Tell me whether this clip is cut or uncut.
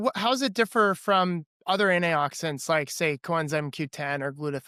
uncut